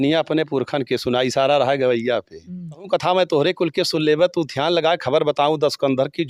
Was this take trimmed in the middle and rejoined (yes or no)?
yes